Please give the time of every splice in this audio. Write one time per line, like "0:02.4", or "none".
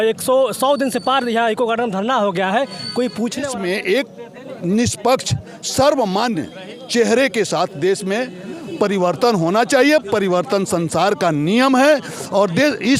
0:03.5